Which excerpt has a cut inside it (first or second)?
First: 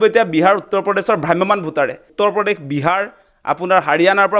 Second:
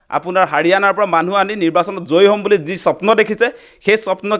first